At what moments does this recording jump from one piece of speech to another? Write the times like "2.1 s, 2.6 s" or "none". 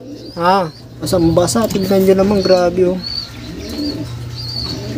1.0 s